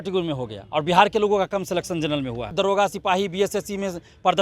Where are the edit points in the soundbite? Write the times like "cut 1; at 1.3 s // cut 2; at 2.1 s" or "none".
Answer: cut 1; at 2.5 s